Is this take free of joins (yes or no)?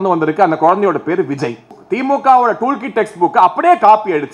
no